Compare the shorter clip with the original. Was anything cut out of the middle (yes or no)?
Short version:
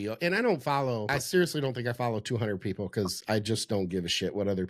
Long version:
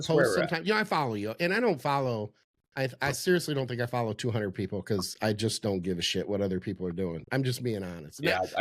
yes